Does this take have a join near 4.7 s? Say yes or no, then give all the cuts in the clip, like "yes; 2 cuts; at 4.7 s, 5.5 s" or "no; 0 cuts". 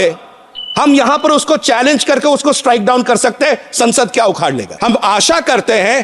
yes; 1 cut; at 4.7 s